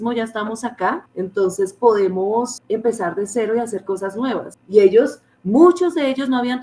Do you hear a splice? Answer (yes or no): yes